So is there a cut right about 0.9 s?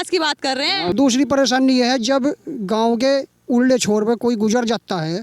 yes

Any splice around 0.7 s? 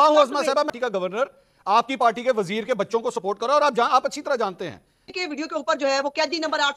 yes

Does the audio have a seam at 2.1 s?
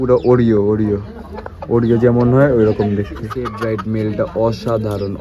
no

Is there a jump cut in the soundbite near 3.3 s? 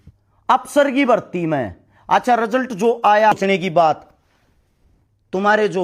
yes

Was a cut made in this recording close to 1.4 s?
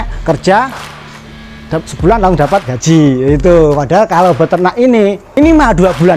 no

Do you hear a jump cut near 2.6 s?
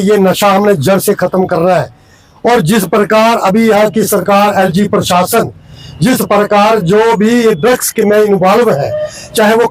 no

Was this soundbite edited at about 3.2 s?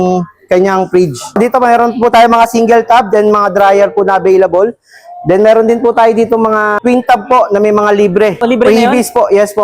no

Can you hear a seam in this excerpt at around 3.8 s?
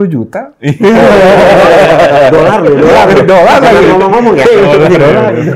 no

